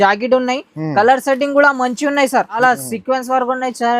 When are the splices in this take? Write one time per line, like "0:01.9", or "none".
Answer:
0:02.6